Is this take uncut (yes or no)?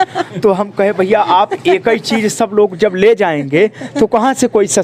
yes